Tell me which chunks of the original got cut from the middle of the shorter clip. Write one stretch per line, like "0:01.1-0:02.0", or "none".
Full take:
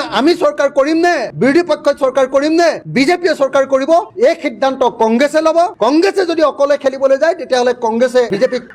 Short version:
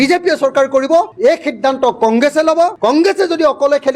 none